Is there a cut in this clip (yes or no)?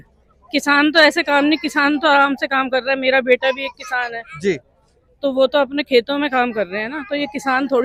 no